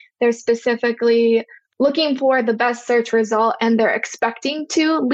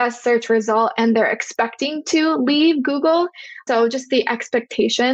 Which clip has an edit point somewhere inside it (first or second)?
first